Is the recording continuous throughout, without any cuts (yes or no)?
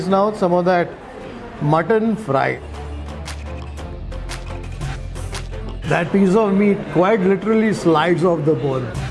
no